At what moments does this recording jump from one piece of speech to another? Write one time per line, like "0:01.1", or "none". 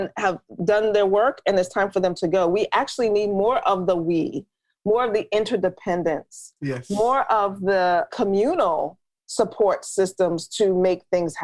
0:08.1

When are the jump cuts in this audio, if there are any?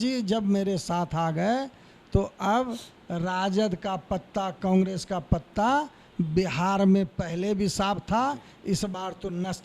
none

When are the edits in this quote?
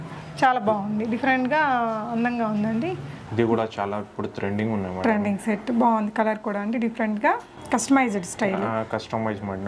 0:03.2
0:07.5

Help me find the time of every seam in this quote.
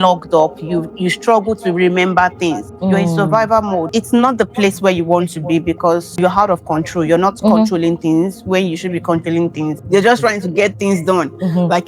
0:02.7
0:03.9
0:06.2
0:09.8

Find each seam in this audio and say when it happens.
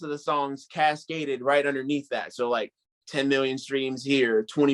none

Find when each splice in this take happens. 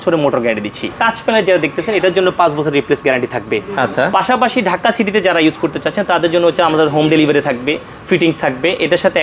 0:00.9

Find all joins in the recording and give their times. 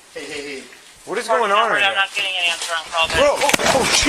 0:01.2

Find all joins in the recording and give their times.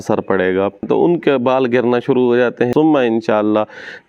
0:00.8
0:02.7

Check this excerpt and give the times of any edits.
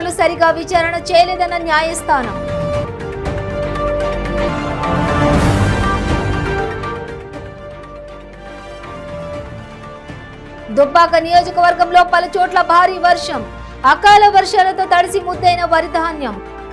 none

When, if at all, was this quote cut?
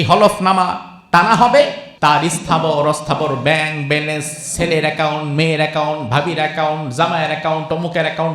0:01.8

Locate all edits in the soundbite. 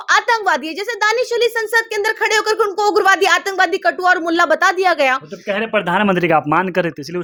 none

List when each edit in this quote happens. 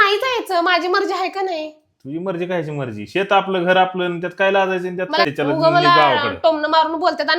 0:05.3

